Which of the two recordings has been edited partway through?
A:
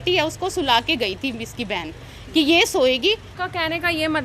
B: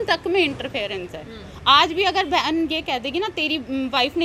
A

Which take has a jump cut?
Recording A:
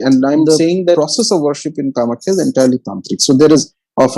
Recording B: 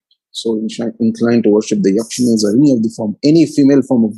A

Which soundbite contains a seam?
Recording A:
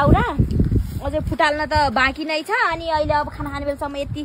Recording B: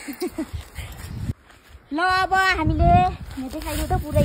B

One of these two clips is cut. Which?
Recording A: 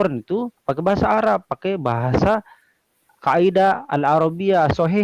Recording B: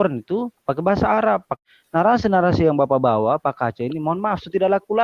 B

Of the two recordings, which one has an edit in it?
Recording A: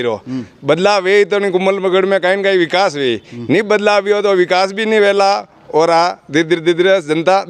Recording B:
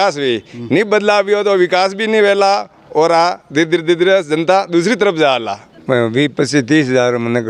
B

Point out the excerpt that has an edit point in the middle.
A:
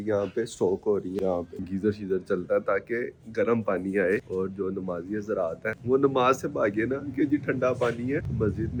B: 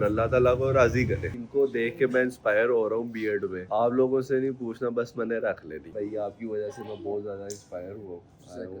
B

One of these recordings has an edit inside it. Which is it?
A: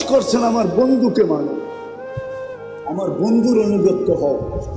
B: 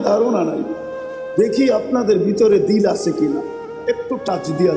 A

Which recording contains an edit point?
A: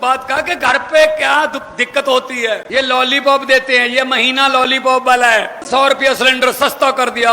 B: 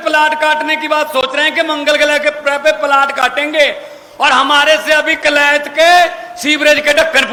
A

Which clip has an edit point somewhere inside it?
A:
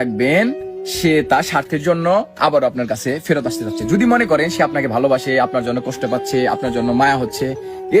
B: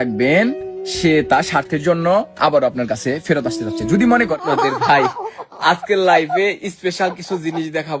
B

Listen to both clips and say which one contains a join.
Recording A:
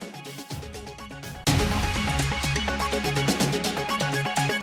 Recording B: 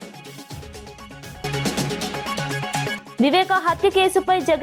B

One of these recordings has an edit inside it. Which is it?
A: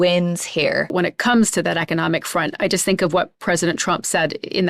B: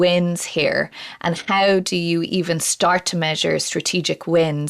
A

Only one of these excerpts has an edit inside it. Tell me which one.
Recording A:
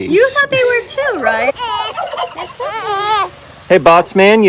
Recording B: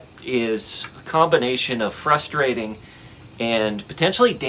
A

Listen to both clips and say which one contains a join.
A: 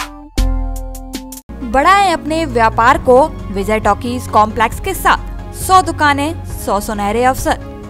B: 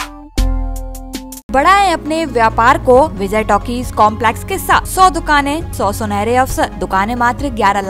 B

